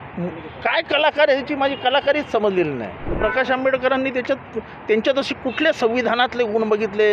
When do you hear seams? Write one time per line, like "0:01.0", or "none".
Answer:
0:03.1

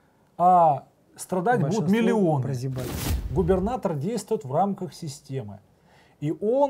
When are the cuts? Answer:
0:03.0

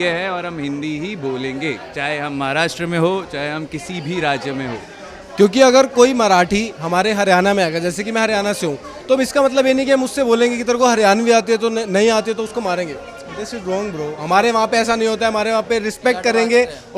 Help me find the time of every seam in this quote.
none

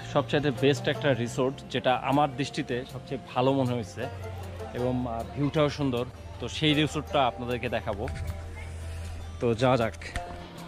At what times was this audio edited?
none

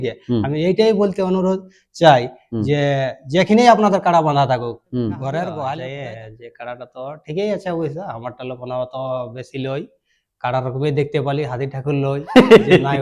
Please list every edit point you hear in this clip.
0:05.9

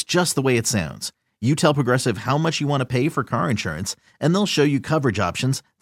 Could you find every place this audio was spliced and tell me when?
none

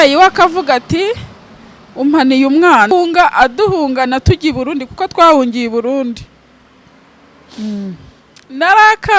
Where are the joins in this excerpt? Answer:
0:02.9

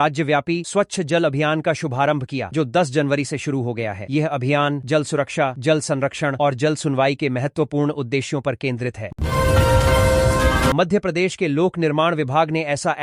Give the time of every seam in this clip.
none

